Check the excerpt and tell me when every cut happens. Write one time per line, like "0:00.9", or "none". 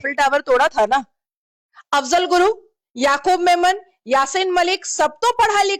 none